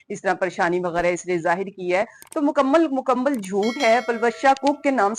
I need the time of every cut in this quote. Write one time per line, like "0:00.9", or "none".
none